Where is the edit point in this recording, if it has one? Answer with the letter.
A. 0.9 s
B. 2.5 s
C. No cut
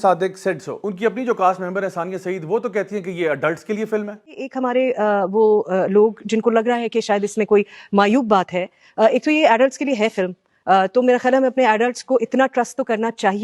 A